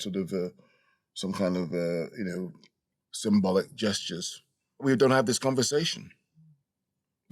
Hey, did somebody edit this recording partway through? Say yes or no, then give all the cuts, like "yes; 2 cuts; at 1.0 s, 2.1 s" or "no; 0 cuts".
yes; 1 cut; at 4.8 s